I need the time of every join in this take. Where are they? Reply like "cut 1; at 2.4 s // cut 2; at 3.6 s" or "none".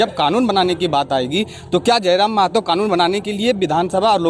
none